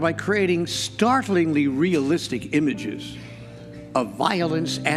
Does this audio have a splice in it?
no; 0 cuts

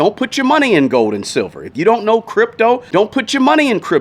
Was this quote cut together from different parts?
yes; 1 cut; at 2.8 s

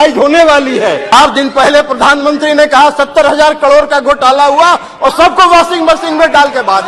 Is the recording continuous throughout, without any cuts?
no; 1 cut; at 1.1 s

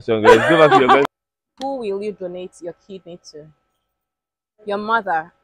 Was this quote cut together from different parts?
yes; 1 cut; at 1.1 s

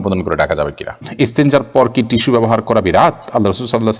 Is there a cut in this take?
yes; 1 cut; at 1.1 s

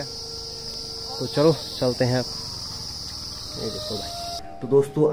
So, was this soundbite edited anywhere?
no; 0 cuts

